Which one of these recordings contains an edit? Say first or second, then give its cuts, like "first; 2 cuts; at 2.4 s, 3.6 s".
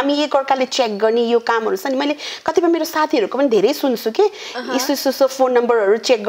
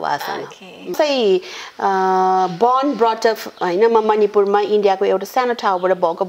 second; 1 cut; at 0.9 s